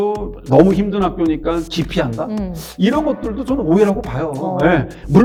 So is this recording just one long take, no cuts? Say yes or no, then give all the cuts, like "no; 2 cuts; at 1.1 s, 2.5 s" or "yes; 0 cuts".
yes; 0 cuts